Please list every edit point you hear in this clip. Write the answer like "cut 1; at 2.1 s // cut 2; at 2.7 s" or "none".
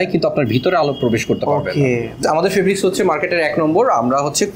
cut 1; at 2.2 s